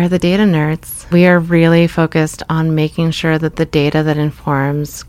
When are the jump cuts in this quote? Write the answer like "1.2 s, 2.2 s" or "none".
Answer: 1.1 s